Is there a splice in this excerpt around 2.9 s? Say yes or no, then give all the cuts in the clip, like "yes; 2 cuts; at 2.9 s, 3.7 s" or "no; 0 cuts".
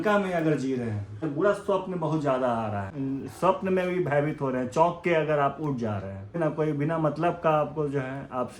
yes; 3 cuts; at 1.2 s, 2.9 s, 6.4 s